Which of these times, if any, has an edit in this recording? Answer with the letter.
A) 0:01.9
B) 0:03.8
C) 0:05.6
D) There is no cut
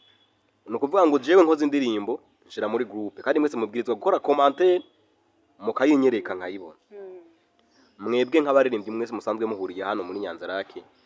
D